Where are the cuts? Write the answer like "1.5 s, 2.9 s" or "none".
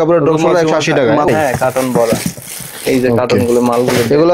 1.3 s